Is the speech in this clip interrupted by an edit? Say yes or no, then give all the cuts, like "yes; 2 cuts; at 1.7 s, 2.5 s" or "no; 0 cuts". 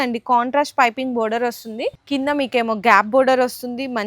yes; 1 cut; at 2.0 s